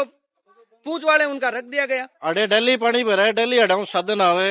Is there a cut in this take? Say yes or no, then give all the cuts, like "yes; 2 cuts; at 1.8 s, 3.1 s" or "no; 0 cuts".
no; 0 cuts